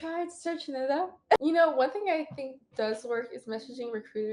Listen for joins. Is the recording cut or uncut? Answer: cut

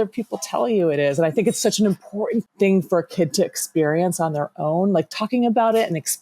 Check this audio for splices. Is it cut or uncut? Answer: cut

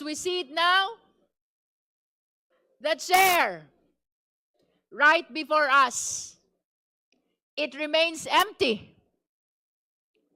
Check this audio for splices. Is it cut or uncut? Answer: uncut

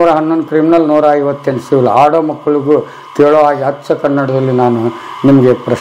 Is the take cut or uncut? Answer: uncut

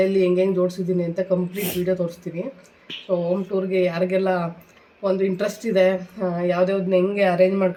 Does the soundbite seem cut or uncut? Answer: uncut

